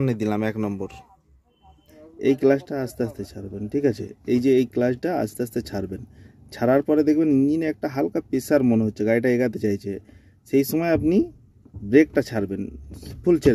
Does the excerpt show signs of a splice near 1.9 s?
yes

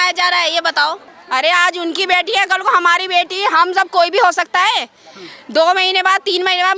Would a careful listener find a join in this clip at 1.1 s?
yes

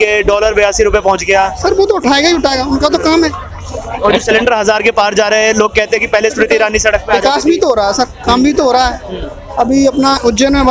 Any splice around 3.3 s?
no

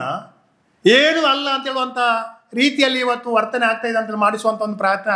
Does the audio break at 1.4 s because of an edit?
no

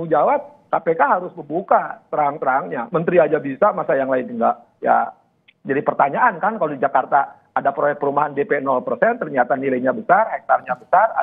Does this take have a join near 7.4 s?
no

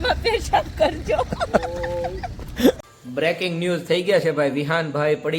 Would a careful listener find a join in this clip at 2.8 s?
yes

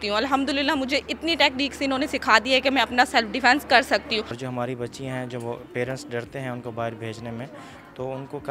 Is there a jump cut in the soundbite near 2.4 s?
no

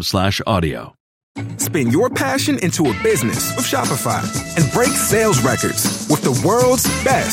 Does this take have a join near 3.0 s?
no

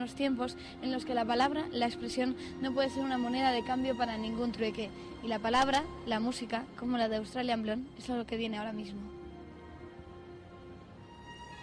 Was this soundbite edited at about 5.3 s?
yes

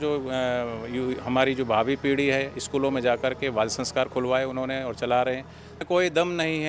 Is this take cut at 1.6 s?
no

